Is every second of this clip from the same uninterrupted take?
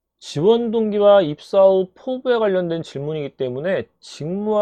yes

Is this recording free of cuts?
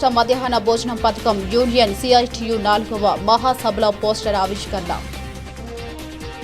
no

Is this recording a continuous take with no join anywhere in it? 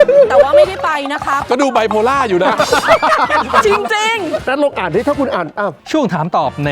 no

